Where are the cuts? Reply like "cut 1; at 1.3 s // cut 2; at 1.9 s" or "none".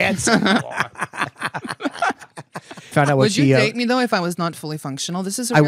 cut 1; at 2.9 s